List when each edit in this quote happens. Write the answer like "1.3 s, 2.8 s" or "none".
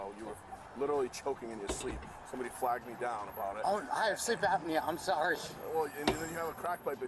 6.2 s